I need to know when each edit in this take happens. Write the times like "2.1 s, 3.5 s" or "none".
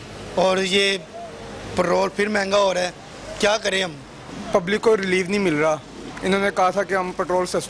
4.3 s